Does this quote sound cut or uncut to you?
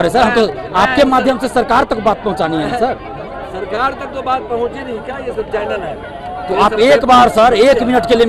uncut